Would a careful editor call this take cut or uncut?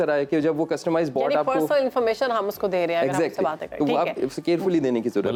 uncut